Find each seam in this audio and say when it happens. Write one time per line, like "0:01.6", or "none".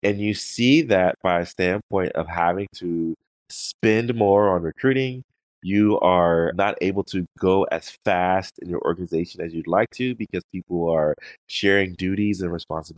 0:03.4
0:06.5